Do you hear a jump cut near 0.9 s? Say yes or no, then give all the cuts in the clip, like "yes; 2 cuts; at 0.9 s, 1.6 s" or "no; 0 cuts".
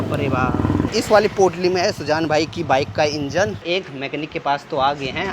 yes; 2 cuts; at 0.9 s, 3.6 s